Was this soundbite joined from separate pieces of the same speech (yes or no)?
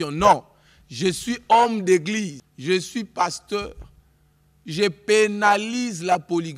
yes